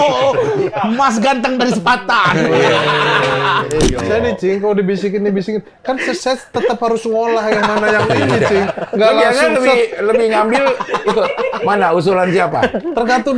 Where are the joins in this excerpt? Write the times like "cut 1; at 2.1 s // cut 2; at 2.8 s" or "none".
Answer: cut 1; at 3.8 s